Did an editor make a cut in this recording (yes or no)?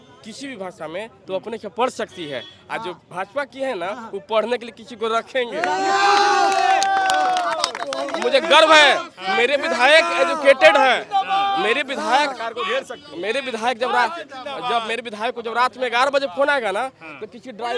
no